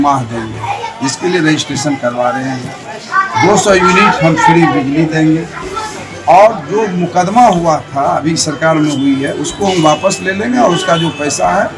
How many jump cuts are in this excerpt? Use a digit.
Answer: 0